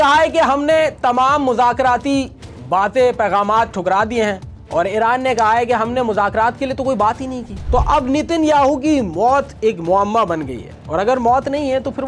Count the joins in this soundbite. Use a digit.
0